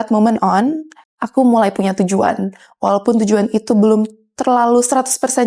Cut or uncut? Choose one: uncut